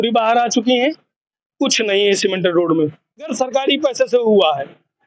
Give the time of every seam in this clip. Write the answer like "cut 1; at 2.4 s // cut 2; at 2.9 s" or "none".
cut 1; at 3.3 s